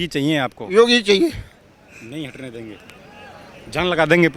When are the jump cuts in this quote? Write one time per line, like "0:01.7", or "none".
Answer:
none